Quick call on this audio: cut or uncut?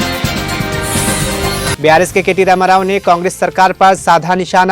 cut